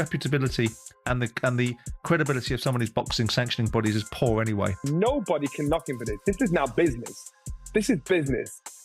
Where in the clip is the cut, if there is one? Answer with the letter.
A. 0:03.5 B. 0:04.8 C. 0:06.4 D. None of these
B